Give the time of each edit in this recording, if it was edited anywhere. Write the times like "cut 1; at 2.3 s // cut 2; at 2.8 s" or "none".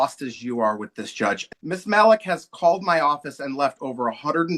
cut 1; at 1.5 s

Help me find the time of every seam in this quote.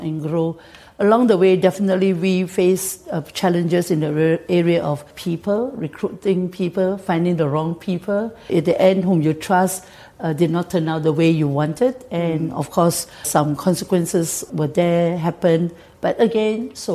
cut 1; at 5.1 s // cut 2; at 8.4 s // cut 3; at 13.3 s // cut 4; at 14.5 s

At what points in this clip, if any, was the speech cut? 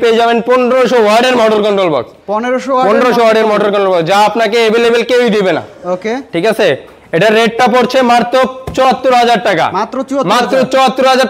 none

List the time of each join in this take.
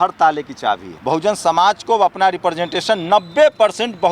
cut 1; at 0.9 s

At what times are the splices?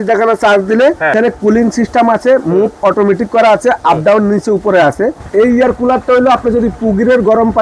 cut 1; at 1.1 s // cut 2; at 5.2 s

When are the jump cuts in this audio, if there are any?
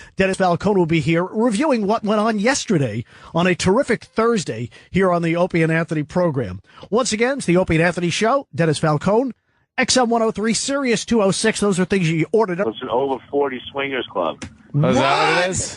none

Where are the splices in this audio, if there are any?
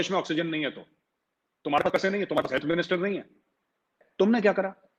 cut 1; at 4.0 s

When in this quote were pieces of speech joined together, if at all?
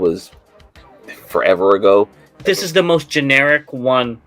cut 1; at 2.2 s

